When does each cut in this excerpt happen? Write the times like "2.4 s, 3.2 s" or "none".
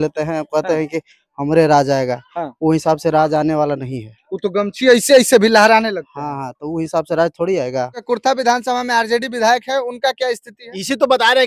8.1 s

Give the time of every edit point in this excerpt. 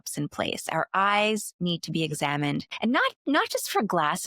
2.7 s

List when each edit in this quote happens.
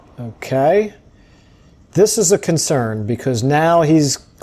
none

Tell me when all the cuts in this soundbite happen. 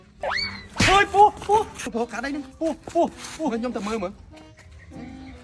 1.8 s

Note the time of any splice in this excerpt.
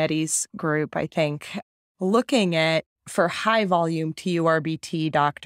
3.0 s

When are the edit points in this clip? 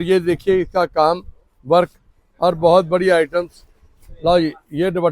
none

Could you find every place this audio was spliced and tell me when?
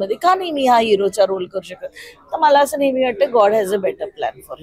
none

